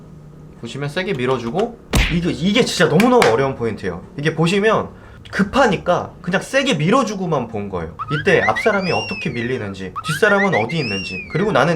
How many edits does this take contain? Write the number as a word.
one